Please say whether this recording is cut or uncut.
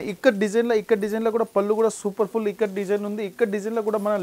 uncut